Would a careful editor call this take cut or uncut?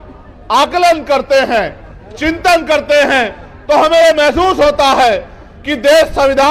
uncut